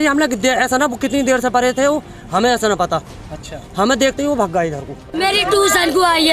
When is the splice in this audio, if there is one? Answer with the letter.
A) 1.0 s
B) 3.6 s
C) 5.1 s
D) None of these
C